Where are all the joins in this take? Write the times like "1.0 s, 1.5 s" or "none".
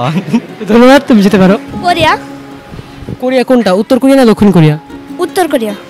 1.7 s